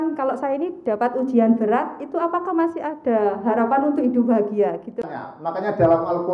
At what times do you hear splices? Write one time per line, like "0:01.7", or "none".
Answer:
0:05.0